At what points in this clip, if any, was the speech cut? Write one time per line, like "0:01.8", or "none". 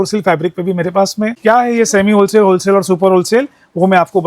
0:01.4